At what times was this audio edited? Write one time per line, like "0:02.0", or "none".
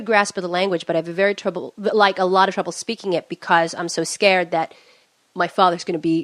0:02.0